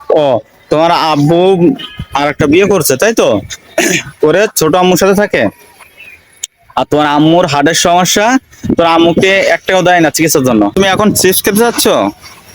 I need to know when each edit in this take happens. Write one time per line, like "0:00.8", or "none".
0:10.7

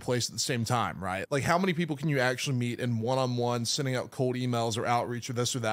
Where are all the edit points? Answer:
0:01.1

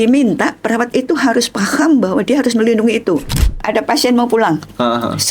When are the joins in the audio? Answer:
0:03.6

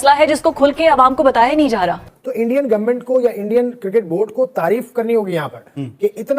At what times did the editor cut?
0:02.0

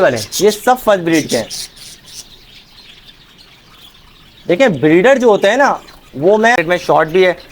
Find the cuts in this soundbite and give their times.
0:06.6

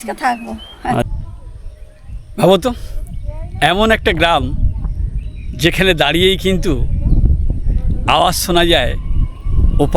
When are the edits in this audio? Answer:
0:01.2

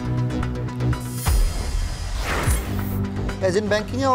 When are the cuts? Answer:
none

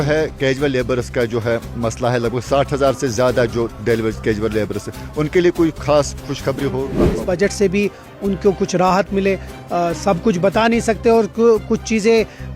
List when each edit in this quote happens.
0:07.2

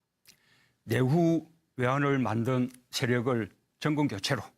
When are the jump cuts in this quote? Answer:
0:01.6

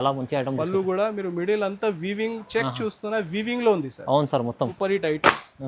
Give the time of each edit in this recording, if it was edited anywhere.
0:04.6

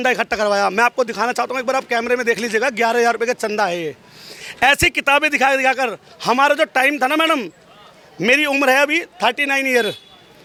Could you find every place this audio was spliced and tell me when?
none

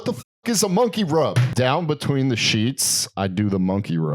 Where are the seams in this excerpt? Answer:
0:01.5

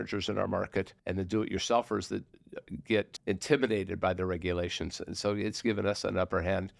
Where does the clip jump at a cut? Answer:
0:01.0
0:03.1

